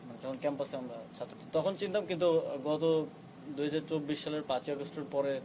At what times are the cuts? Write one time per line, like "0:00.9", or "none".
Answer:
0:01.3